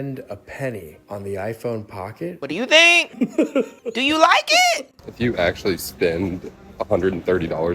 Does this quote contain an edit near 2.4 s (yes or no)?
yes